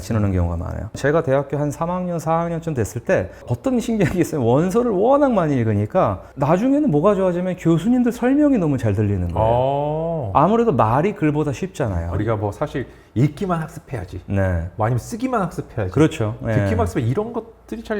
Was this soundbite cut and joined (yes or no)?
yes